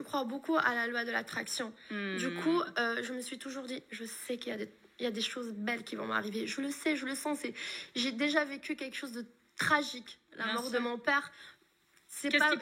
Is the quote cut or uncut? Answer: uncut